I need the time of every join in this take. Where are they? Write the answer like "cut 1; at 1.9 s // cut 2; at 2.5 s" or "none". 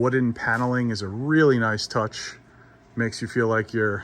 none

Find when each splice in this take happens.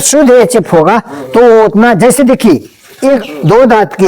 cut 1; at 3.2 s

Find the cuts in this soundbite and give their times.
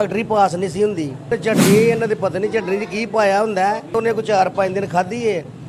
cut 1; at 1.3 s // cut 2; at 4.0 s

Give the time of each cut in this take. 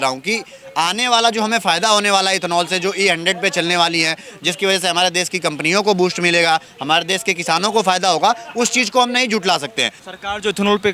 cut 1; at 10.0 s

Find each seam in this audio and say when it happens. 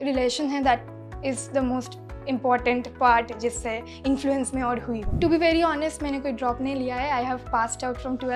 cut 1; at 5.2 s

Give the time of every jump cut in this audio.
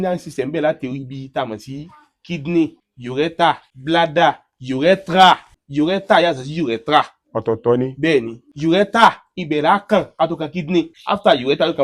cut 1; at 3.4 s // cut 2; at 5.6 s // cut 3; at 8.4 s // cut 4; at 11.0 s

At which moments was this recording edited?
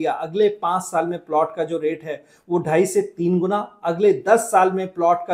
none

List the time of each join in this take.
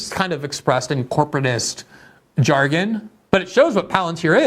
cut 1; at 3.1 s

